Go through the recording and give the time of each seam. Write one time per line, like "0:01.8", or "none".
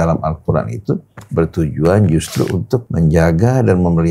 0:02.8